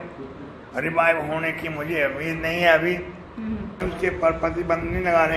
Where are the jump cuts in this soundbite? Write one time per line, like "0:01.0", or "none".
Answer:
0:03.8